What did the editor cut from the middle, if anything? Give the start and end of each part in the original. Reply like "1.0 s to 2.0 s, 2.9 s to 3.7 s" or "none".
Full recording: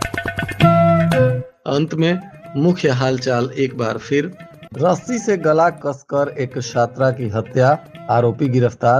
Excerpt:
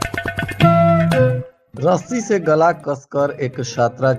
1.5 s to 4.5 s